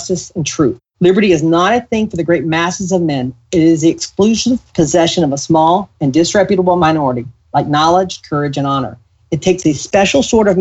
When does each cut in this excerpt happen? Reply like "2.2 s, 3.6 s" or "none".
4.7 s, 6.8 s

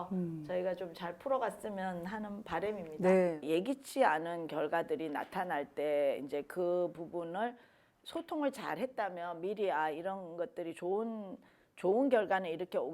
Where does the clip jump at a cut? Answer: 3.4 s

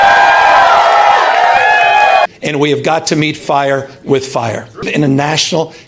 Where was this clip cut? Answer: 2.3 s, 4.9 s

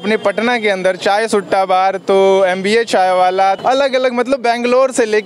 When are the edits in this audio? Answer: 3.6 s

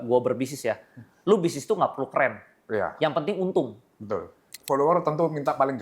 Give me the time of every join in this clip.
4.5 s

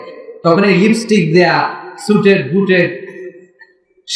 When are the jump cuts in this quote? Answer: none

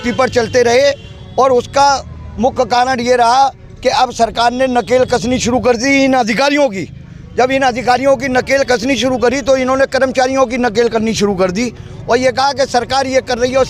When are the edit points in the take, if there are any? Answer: none

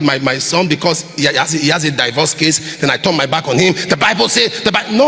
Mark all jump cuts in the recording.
none

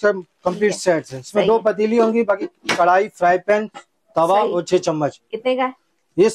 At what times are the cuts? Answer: none

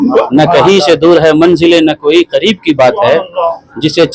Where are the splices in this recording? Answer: none

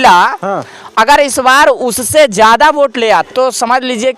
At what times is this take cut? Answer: 3.3 s

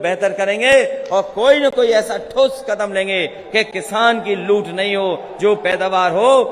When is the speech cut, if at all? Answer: none

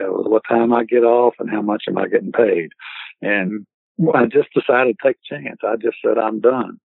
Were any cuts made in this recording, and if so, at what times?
3.8 s

